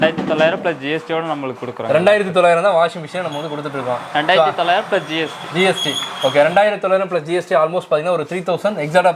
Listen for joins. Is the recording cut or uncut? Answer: uncut